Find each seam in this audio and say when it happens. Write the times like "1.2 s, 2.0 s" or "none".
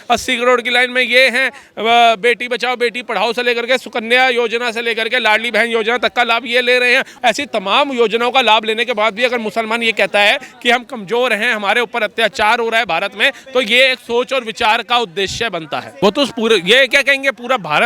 7.1 s, 15.8 s